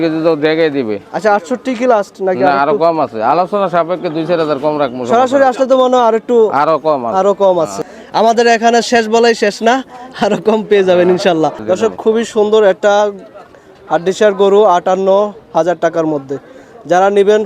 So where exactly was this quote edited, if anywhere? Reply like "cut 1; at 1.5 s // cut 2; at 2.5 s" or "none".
cut 1; at 7.8 s // cut 2; at 11.6 s

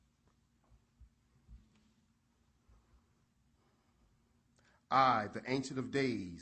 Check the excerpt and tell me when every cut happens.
none

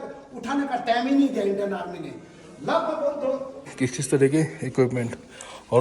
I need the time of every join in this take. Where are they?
cut 1; at 3.7 s

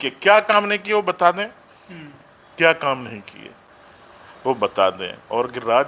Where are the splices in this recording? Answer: none

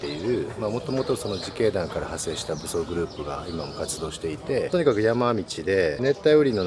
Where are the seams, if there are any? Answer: cut 1; at 4.7 s

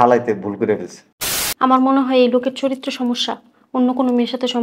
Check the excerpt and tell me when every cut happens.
cut 1; at 1.4 s

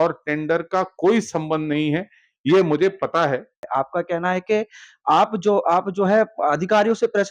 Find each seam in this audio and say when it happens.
cut 1; at 3.6 s

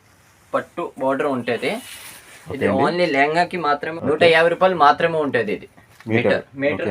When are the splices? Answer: cut 1; at 3.9 s

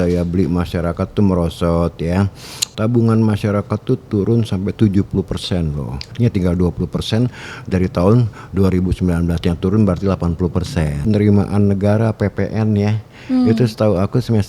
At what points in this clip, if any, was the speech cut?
cut 1; at 2.6 s // cut 2; at 6.1 s // cut 3; at 11.0 s

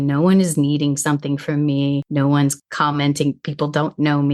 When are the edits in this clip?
cut 1; at 2.3 s

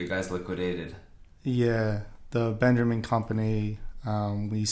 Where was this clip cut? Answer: none

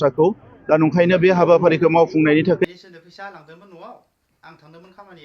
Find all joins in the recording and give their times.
cut 1; at 2.6 s

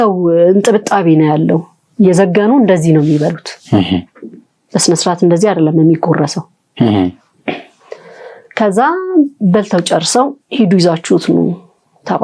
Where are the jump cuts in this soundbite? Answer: none

